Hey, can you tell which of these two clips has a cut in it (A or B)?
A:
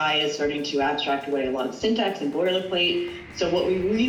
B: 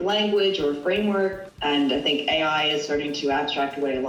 B